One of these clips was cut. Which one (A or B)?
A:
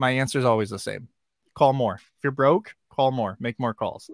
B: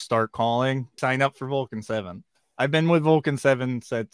B